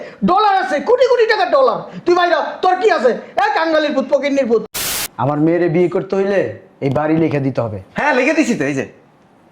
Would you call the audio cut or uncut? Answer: cut